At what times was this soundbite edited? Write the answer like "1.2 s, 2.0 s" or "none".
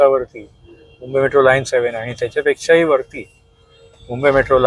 none